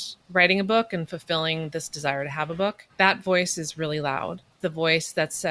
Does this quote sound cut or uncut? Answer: cut